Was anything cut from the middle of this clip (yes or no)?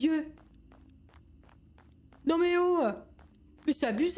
no